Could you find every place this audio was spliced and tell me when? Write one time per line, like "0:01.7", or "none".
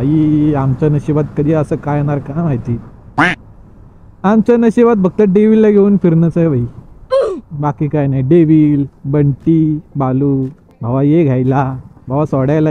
none